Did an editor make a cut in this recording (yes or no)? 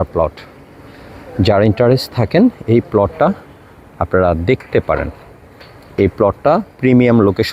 no